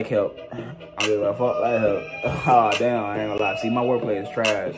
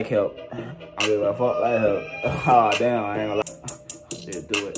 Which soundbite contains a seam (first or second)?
second